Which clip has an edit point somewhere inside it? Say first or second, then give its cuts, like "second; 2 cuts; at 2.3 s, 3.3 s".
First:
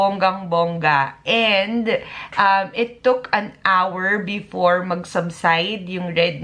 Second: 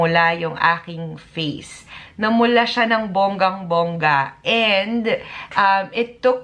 second; 1 cut; at 2.0 s